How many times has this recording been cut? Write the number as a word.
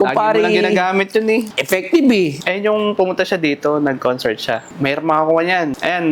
three